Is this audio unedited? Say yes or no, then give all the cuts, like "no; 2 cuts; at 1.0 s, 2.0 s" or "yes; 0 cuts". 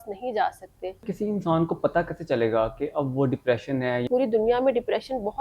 no; 2 cuts; at 1.0 s, 4.1 s